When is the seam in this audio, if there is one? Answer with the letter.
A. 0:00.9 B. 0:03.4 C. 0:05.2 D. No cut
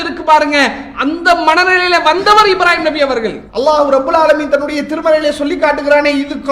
B